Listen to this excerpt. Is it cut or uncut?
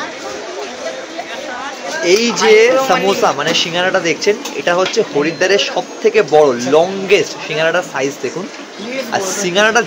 cut